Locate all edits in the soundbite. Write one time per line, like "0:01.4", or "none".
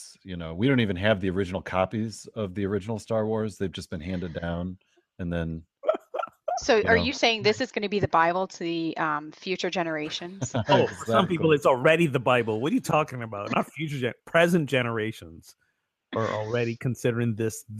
none

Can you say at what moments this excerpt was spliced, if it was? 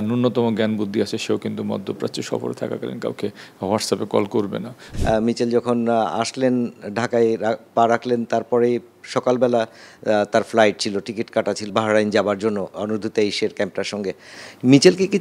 0:04.8
0:11.7
0:12.7
0:14.3

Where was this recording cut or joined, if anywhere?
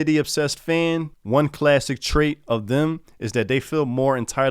0:01.1

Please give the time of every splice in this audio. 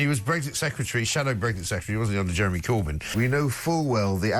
0:03.0

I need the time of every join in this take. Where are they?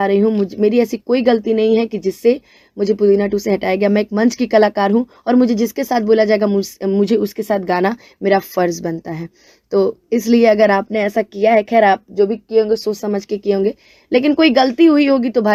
none

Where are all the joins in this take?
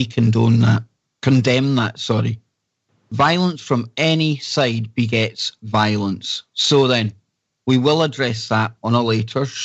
0:01.1

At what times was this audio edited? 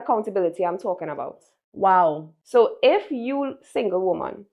none

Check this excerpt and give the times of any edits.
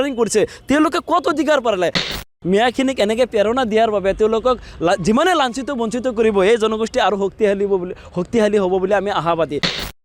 0:02.2

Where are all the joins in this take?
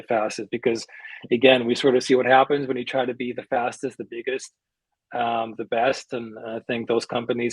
none

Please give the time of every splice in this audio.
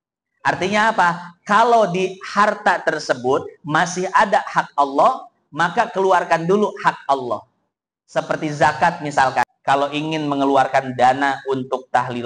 0:09.5

